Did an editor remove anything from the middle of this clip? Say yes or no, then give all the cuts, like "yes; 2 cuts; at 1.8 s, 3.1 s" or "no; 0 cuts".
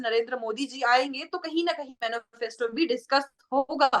yes; 1 cut; at 1.9 s